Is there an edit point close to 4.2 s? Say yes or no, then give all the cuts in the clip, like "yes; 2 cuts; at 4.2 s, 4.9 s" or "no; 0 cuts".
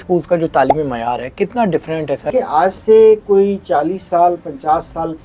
no; 1 cut; at 2.3 s